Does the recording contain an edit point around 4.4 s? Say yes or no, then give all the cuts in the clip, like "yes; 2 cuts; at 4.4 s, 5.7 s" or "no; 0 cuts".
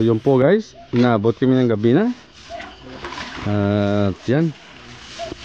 no; 0 cuts